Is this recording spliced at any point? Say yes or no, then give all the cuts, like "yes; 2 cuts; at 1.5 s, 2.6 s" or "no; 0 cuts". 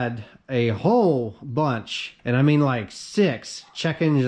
no; 0 cuts